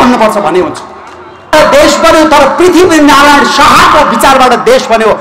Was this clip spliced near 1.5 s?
yes; 1 cut; at 1.5 s

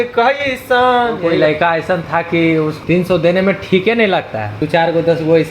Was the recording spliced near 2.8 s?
yes; 3 cuts; at 1.3 s, 2.8 s, 4.6 s

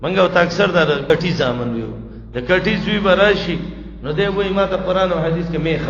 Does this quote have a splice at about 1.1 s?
yes; 1 cut; at 1.1 s

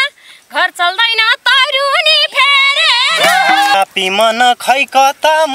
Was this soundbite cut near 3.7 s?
yes; 1 cut; at 3.7 s

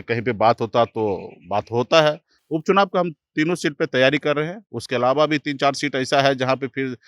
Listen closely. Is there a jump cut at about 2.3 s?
yes; 1 cut; at 2.3 s

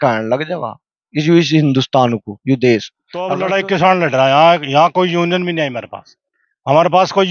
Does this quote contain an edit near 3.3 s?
yes; 1 cut; at 3.3 s

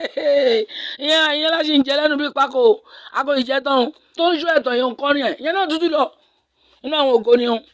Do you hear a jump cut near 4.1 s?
yes; 1 cut; at 4.1 s

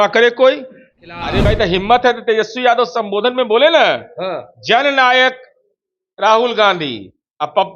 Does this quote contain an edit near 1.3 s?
yes; 1 cut; at 1.3 s

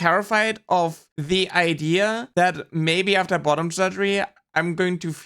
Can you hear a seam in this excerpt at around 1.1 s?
yes; 2 cuts; at 1.1 s, 2.2 s

